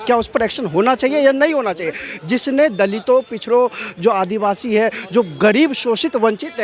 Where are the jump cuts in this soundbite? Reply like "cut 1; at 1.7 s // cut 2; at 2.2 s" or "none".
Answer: none